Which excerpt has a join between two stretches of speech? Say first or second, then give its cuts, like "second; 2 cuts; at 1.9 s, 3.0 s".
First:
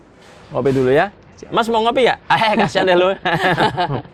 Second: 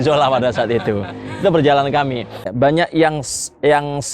second; 1 cut; at 2.5 s